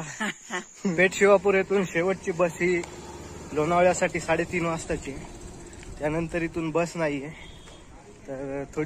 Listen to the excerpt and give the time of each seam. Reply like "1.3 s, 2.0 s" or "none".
0.9 s